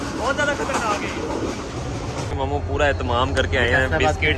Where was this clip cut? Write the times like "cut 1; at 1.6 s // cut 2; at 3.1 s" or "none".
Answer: cut 1; at 2.3 s